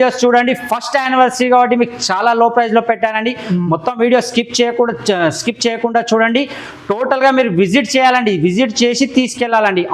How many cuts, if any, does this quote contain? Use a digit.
0